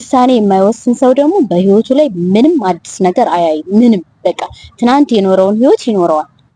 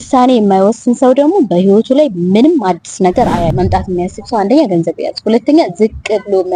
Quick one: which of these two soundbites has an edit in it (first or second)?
second